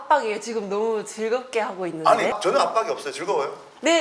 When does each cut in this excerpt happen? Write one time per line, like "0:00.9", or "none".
0:02.4